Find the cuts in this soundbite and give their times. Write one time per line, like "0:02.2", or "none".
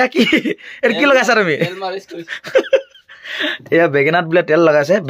none